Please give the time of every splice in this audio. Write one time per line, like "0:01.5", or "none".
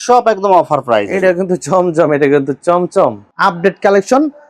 0:03.2